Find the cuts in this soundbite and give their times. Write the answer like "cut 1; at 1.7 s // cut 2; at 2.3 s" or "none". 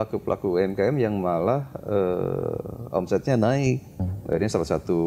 cut 1; at 3.9 s

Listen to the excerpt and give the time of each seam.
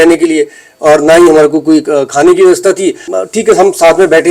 cut 1; at 3.1 s

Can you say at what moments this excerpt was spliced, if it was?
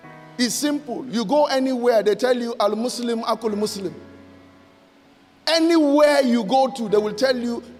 none

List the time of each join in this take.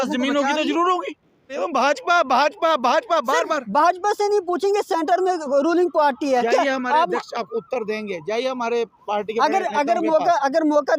cut 1; at 1.5 s

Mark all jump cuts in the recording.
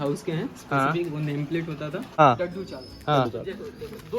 cut 1; at 2.2 s

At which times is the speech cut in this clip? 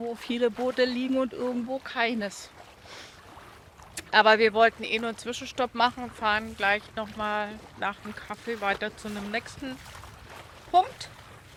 none

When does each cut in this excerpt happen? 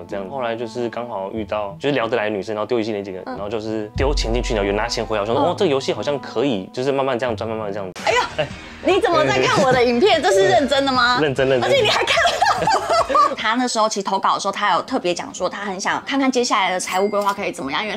cut 1; at 7.9 s // cut 2; at 13.3 s

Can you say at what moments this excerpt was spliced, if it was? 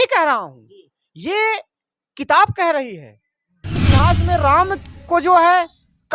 cut 1; at 3.8 s

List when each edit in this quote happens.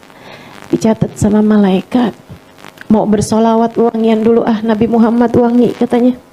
none

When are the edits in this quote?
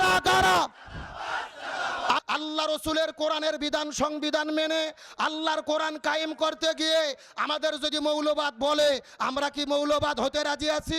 cut 1; at 2.2 s

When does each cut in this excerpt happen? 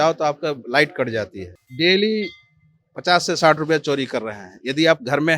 cut 1; at 1.6 s

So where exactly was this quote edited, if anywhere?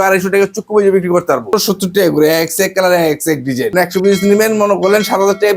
cut 1; at 1.5 s // cut 2; at 3.7 s

